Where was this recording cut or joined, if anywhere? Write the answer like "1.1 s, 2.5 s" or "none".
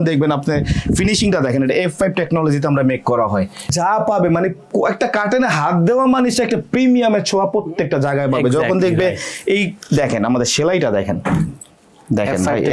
3.7 s